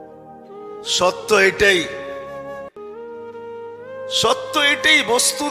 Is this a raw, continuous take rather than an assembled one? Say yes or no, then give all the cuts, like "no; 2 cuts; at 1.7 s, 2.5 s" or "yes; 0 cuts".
no; 2 cuts; at 1.9 s, 3.5 s